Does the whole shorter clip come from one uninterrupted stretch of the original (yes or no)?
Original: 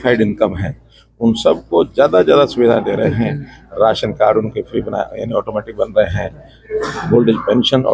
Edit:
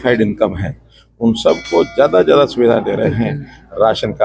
yes